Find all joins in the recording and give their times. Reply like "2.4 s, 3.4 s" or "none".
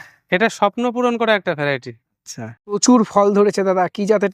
2.8 s